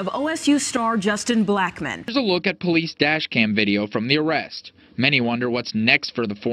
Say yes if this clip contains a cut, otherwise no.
yes